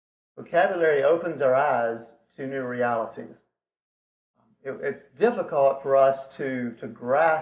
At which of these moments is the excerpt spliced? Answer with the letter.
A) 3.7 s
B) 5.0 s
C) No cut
C